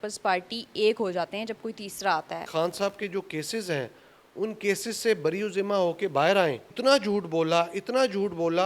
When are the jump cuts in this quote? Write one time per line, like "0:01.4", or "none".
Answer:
0:02.5
0:06.7